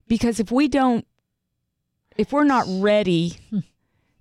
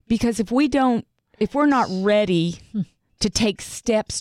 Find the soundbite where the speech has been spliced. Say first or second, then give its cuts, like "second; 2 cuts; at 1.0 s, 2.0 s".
second; 2 cuts; at 1.2 s, 3.0 s